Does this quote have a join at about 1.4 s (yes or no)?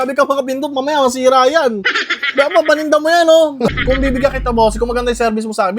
no